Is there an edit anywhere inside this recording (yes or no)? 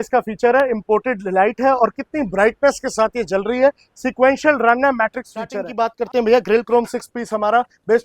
yes